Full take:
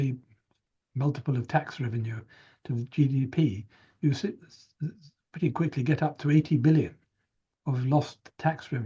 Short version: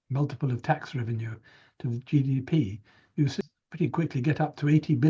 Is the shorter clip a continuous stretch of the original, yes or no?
no